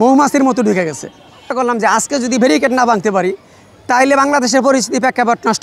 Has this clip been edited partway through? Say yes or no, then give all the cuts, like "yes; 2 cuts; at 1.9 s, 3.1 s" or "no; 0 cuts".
yes; 1 cut; at 1.2 s